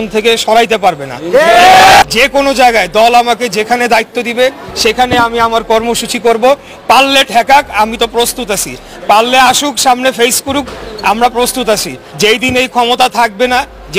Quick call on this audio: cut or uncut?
cut